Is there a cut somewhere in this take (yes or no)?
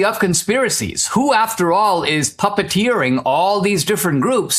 no